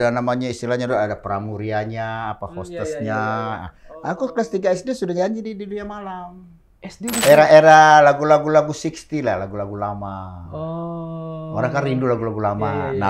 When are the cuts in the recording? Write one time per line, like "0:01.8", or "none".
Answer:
0:07.2